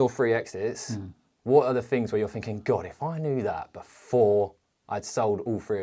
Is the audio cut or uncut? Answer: uncut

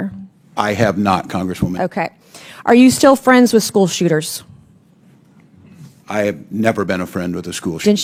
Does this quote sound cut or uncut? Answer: uncut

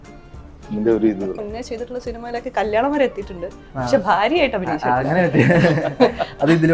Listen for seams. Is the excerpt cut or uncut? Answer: cut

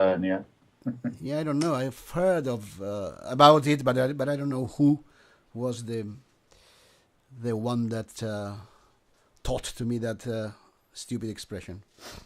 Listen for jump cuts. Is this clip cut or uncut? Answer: uncut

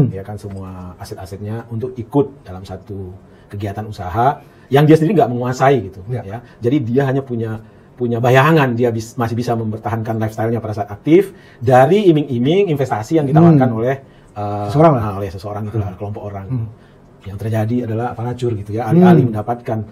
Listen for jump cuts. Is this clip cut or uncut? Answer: uncut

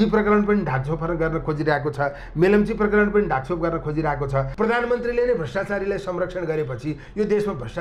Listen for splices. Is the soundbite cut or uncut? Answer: cut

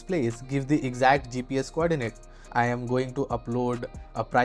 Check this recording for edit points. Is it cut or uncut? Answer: uncut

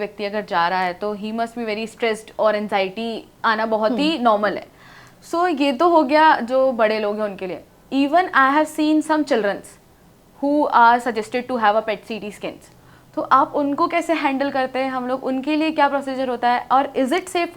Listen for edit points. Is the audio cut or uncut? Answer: uncut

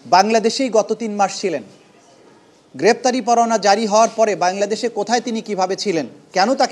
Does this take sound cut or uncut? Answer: uncut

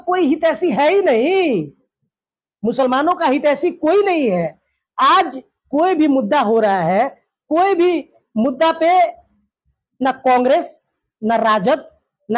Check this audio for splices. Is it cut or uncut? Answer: uncut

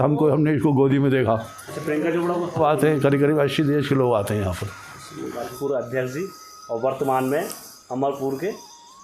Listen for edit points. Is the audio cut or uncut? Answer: cut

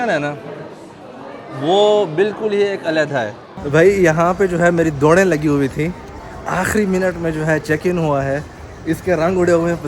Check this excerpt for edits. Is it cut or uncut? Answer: cut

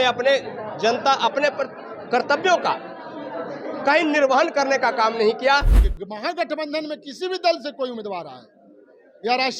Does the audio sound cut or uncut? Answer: cut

